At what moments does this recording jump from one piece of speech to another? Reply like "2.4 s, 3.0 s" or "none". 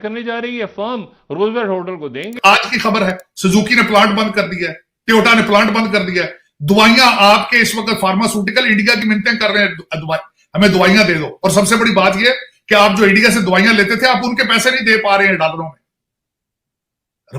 2.4 s